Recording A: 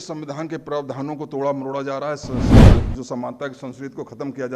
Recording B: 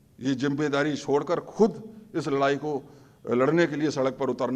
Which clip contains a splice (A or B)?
A